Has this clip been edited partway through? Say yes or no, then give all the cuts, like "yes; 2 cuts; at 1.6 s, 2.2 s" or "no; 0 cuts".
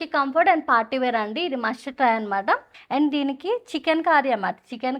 yes; 1 cut; at 2.7 s